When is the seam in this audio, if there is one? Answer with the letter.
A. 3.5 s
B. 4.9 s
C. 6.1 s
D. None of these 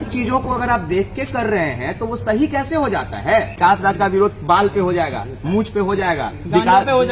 A